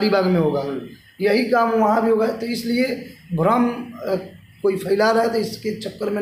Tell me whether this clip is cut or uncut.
uncut